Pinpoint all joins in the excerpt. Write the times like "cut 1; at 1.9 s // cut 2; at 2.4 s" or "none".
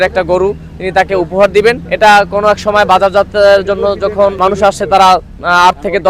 cut 1; at 1.9 s // cut 2; at 4.4 s